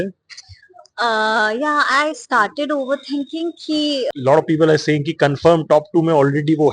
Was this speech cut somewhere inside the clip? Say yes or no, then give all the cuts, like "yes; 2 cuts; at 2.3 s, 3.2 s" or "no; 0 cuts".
yes; 1 cut; at 4.1 s